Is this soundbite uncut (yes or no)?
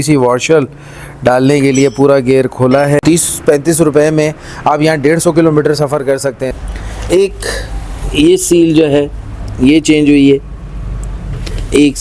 no